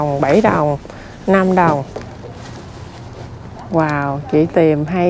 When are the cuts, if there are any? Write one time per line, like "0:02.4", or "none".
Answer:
0:01.9